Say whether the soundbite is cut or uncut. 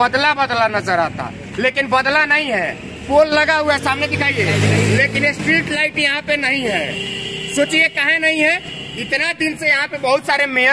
uncut